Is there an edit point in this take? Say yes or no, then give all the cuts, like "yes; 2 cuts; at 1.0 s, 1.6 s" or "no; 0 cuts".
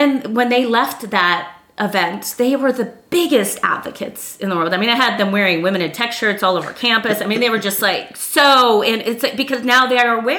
no; 0 cuts